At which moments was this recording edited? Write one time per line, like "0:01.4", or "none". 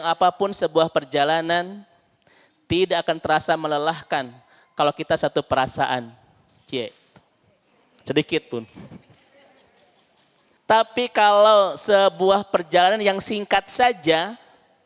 0:10.5